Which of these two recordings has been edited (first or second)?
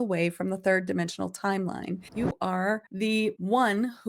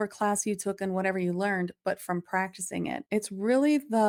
first